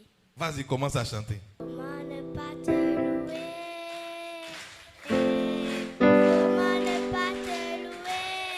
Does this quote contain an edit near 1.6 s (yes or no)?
yes